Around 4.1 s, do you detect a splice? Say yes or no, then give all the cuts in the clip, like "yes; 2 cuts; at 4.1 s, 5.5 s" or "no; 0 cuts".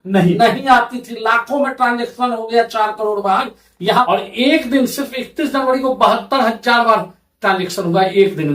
yes; 1 cut; at 4.1 s